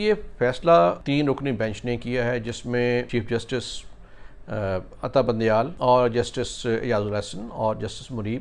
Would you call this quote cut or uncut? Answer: cut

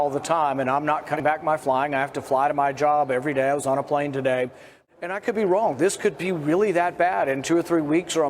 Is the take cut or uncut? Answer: cut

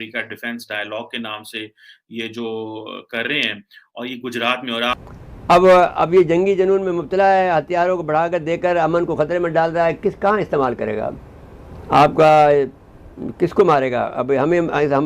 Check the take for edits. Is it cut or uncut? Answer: cut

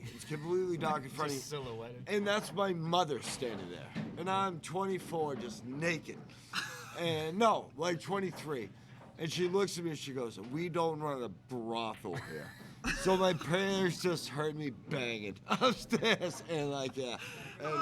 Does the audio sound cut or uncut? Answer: uncut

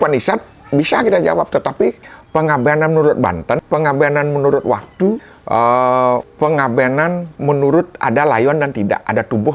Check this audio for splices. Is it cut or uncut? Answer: cut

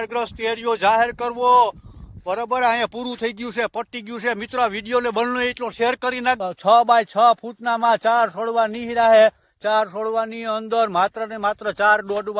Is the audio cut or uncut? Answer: cut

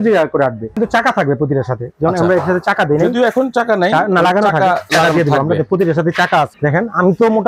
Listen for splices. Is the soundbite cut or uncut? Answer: cut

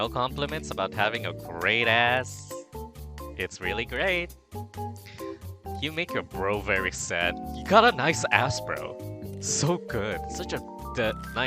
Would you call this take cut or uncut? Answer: uncut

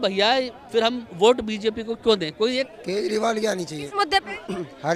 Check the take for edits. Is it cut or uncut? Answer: cut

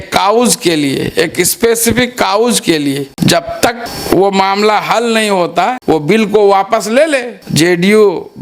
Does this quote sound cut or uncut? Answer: cut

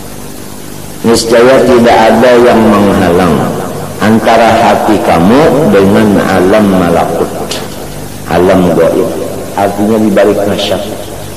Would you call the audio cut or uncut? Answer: uncut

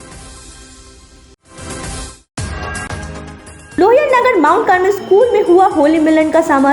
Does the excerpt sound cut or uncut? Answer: cut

